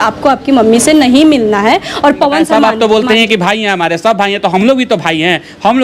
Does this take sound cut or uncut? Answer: cut